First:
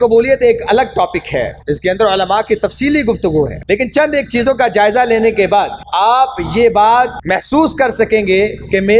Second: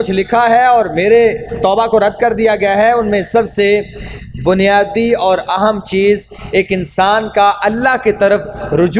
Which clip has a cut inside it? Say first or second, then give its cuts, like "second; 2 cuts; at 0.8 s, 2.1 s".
first; 4 cuts; at 1.6 s, 3.6 s, 5.8 s, 7.2 s